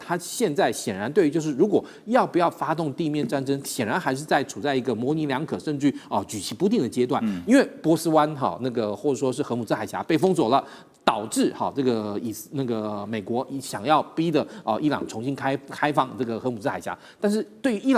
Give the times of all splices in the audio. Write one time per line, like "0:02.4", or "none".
none